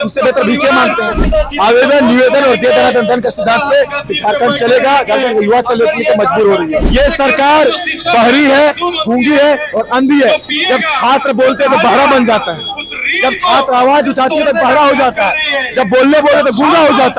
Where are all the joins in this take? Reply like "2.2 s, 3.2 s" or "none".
1.2 s, 6.9 s

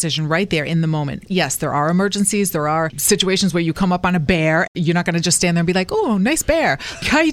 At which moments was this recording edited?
1.2 s, 3.0 s

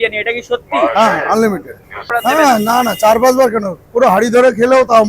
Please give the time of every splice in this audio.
2.0 s

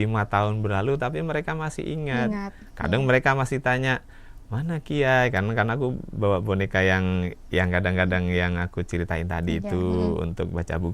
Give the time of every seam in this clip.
none

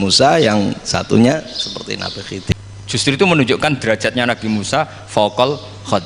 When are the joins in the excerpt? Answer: 2.5 s

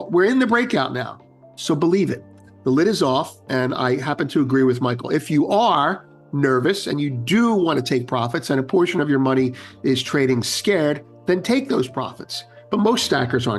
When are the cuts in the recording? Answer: none

